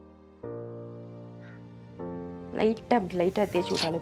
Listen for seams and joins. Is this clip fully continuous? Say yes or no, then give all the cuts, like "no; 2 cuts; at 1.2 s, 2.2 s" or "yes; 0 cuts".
no; 1 cut; at 2.5 s